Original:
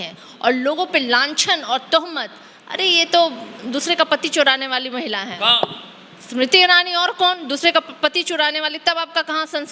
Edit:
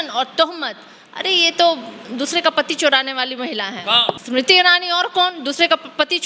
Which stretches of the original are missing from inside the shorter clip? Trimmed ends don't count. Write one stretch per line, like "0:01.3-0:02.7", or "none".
0:05.8-0:06.3